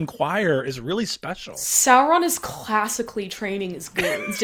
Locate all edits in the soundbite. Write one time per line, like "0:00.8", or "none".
none